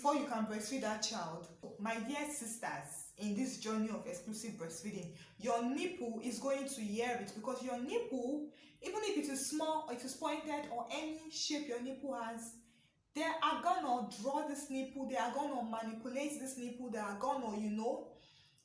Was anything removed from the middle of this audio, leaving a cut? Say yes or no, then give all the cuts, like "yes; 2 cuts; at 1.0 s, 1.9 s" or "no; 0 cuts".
yes; 1 cut; at 1.6 s